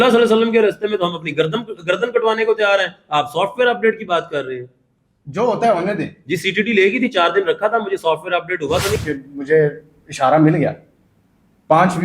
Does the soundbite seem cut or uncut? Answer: cut